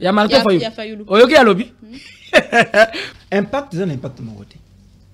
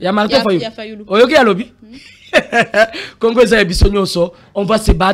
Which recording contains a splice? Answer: first; 1 cut; at 3.0 s

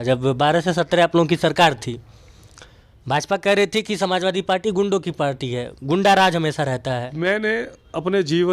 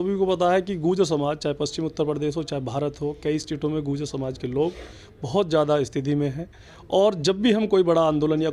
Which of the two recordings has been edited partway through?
first; 1 cut; at 7.1 s

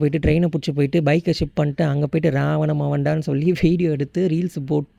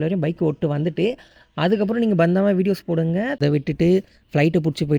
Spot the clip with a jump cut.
second; 1 cut; at 3.4 s

